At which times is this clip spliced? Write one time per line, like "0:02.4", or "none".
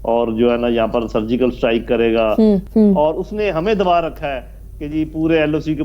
0:02.7